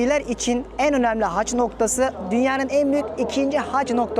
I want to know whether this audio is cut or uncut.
uncut